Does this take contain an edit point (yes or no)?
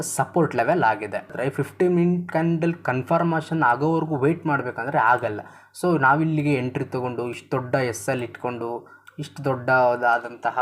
yes